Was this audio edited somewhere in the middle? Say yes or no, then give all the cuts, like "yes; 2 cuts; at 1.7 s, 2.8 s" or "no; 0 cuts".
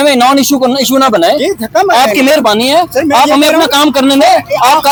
no; 0 cuts